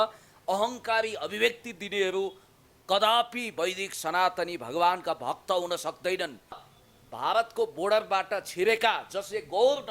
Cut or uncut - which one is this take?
cut